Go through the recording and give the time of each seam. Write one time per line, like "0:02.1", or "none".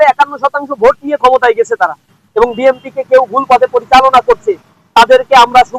0:02.2